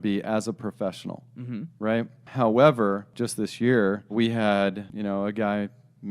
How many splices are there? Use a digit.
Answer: 4